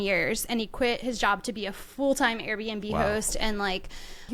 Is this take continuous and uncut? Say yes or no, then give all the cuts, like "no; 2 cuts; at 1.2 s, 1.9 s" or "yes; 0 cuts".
yes; 0 cuts